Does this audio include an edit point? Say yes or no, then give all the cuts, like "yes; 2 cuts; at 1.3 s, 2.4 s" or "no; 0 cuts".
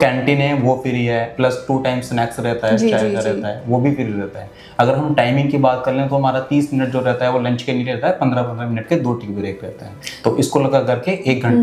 no; 0 cuts